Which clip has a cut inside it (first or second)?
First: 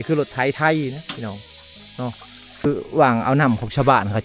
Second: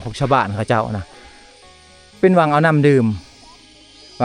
first